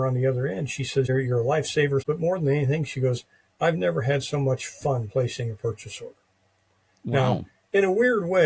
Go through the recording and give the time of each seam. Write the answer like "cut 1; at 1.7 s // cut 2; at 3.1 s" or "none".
cut 1; at 1.1 s // cut 2; at 2.0 s